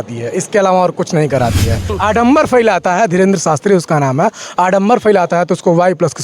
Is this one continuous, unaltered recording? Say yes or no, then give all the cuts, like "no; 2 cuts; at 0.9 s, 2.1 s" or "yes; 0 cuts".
no; 1 cut; at 1.9 s